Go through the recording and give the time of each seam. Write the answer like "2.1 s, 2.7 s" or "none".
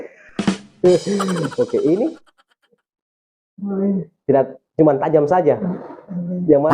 none